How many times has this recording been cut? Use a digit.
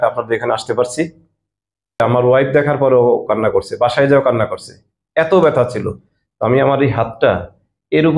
1